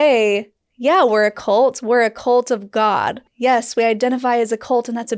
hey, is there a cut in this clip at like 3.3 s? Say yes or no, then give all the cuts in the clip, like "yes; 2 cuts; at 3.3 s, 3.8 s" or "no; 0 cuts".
yes; 1 cut; at 3.3 s